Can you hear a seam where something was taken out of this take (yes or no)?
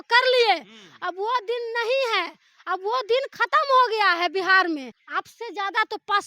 yes